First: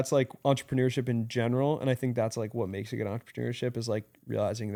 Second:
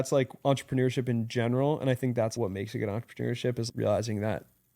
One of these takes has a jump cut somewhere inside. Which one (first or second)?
second